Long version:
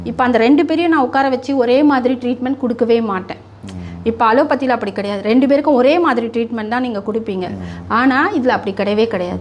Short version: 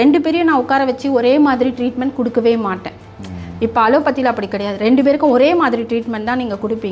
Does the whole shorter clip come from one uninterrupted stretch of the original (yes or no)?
yes